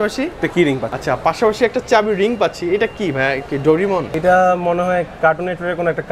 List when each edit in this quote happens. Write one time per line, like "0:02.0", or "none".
0:00.9
0:04.1